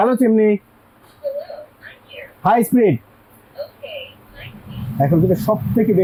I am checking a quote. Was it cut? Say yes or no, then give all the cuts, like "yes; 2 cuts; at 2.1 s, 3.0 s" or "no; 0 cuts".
no; 0 cuts